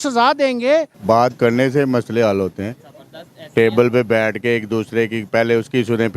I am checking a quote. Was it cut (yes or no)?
yes